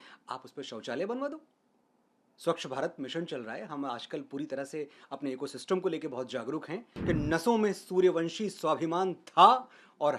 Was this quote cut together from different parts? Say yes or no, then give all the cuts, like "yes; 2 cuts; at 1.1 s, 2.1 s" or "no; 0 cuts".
yes; 1 cut; at 6.9 s